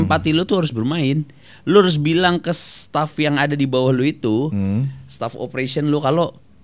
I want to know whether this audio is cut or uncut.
uncut